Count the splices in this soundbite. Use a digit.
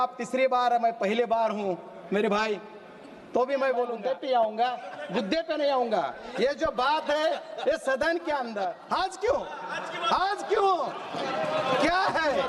2